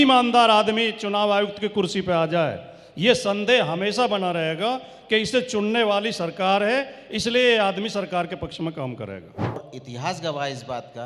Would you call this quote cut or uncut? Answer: cut